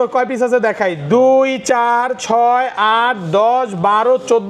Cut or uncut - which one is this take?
uncut